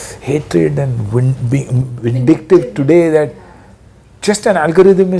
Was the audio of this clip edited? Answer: no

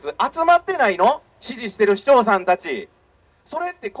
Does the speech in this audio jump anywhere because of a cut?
no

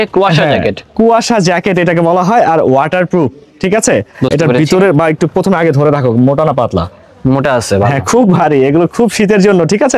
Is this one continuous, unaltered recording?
yes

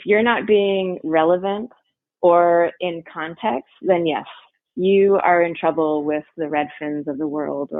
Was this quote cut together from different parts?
no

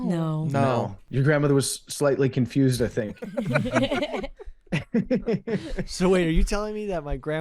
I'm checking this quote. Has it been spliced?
yes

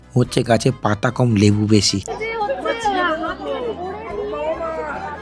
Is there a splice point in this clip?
yes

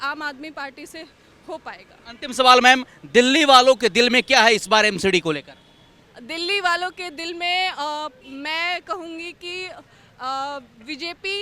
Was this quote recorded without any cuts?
yes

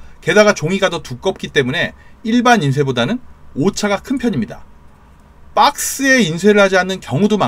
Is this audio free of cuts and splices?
yes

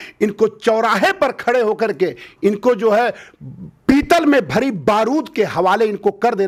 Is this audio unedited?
yes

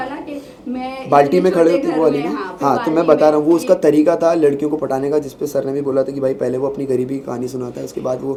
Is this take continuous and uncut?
yes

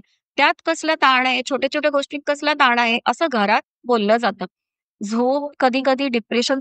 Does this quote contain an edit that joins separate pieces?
yes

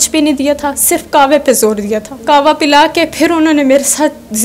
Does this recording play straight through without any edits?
no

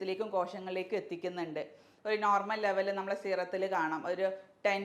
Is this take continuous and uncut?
no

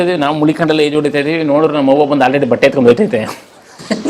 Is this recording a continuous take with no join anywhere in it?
yes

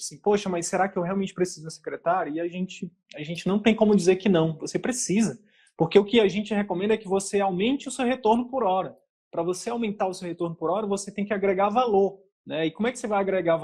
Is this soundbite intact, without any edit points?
yes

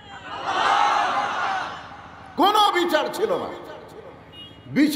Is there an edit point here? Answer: no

